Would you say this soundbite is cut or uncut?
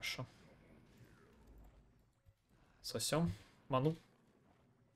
uncut